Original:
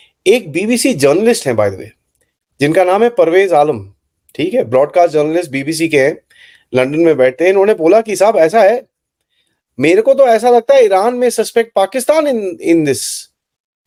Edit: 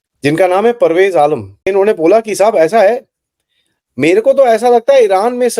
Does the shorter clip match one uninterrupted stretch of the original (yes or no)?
no